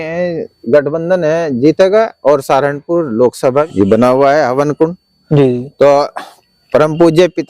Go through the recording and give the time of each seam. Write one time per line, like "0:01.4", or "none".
0:03.7